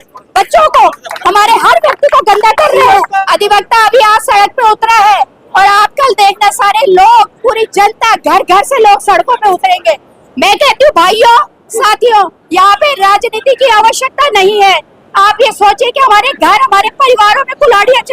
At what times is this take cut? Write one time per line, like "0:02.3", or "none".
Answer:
0:03.2